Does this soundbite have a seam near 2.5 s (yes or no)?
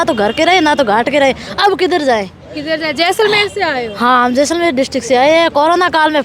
no